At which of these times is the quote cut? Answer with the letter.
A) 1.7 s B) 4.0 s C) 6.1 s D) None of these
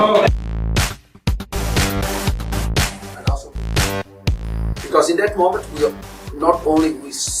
D